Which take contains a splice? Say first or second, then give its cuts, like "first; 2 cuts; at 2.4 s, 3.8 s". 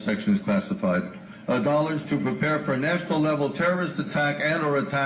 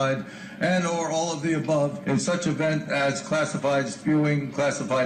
first; 1 cut; at 4.1 s